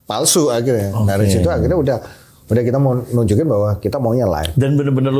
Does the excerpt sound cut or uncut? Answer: uncut